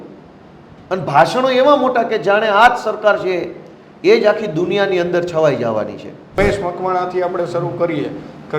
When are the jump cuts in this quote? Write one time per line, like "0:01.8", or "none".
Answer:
0:06.3